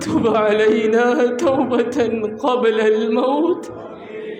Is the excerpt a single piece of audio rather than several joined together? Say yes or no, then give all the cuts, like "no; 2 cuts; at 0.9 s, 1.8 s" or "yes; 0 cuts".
yes; 0 cuts